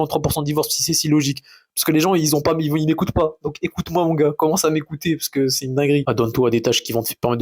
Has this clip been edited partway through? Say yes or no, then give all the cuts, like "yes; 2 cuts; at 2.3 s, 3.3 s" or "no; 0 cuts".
yes; 1 cut; at 6.0 s